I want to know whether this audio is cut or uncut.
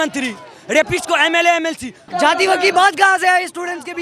cut